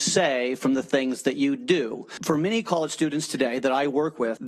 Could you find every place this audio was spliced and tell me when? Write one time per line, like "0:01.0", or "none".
0:02.1